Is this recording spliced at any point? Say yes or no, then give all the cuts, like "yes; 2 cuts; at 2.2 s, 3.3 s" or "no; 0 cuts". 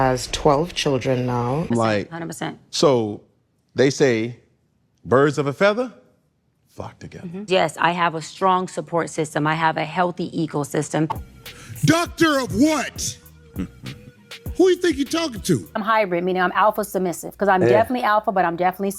yes; 4 cuts; at 1.6 s, 7.5 s, 11.2 s, 15.8 s